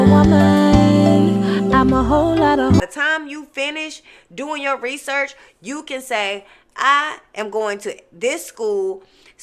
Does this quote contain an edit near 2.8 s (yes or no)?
yes